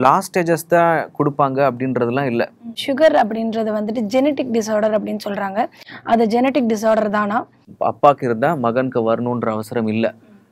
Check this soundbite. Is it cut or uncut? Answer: cut